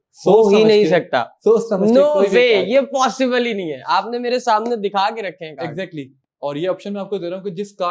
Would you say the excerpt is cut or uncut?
uncut